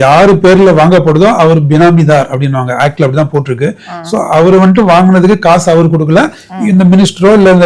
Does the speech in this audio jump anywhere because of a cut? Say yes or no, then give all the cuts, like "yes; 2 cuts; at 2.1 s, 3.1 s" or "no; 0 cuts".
no; 0 cuts